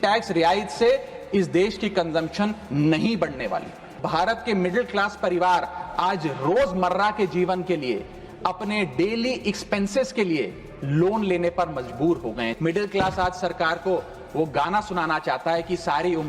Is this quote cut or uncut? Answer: cut